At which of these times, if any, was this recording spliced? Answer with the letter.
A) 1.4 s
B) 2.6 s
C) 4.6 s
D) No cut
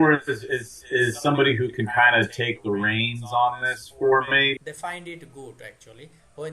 C